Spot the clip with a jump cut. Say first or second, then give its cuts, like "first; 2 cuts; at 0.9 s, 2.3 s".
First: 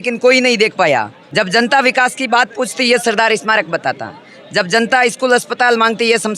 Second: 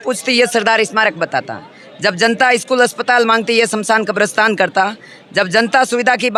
first; 1 cut; at 1.2 s